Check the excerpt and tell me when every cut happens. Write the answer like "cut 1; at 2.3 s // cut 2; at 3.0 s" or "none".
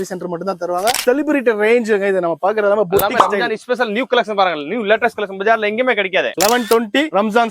cut 1; at 1.0 s // cut 2; at 6.3 s